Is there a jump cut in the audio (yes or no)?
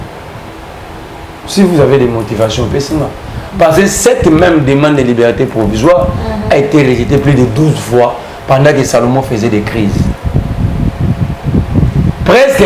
no